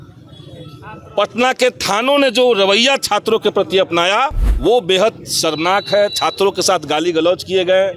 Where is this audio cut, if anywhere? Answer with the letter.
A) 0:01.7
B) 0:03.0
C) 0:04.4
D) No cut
C